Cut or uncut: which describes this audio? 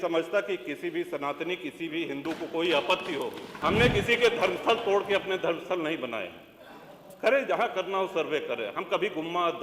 cut